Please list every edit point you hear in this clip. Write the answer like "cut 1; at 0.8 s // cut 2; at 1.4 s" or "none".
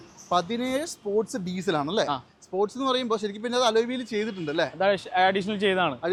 none

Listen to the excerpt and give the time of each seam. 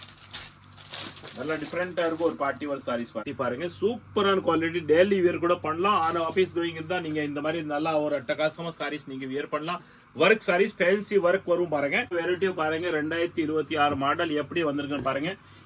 cut 1; at 3.3 s // cut 2; at 12.1 s

